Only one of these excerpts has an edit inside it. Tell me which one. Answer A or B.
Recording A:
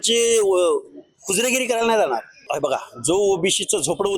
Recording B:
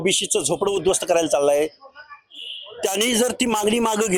A